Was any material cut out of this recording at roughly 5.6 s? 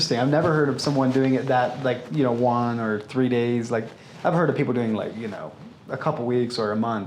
no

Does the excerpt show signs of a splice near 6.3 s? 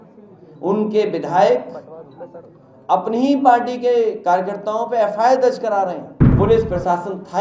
yes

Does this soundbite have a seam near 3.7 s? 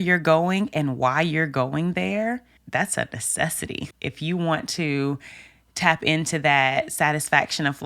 yes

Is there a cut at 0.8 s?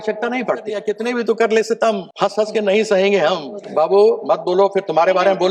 yes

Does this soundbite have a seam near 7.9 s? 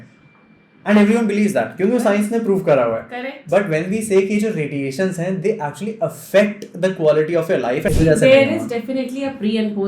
yes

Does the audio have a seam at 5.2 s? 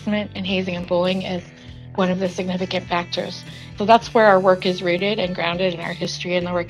no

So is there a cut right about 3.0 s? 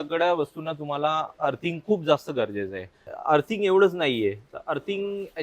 yes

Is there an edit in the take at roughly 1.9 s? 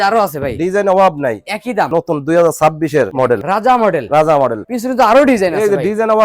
yes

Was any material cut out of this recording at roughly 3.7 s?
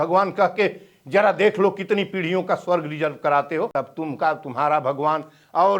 yes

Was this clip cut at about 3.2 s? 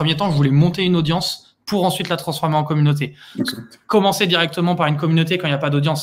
no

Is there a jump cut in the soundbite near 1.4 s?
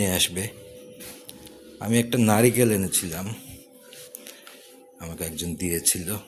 no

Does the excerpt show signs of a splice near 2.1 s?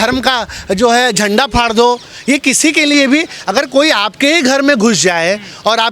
no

